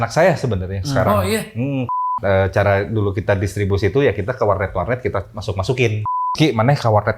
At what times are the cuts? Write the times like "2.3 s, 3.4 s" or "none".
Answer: 2.1 s, 6.1 s